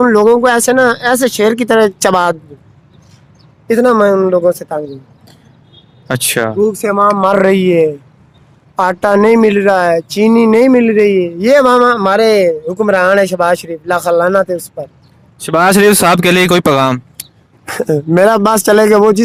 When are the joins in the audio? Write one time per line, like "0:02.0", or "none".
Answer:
none